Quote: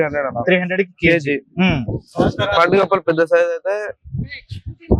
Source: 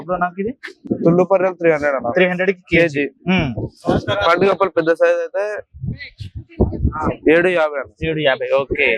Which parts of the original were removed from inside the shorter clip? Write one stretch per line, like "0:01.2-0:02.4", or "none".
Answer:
none